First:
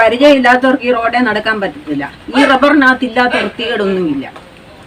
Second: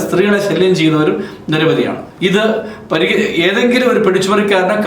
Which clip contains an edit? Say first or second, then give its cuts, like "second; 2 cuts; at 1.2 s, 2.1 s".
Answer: second; 1 cut; at 2.1 s